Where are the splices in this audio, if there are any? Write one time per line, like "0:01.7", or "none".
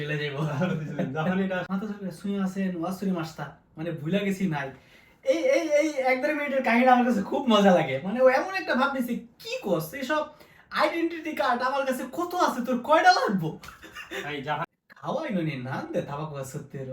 0:01.7
0:14.7